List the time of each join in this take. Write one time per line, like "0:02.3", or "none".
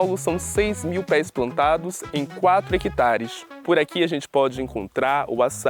none